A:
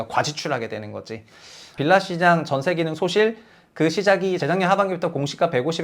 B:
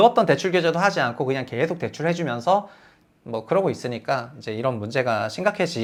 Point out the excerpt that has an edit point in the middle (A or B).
A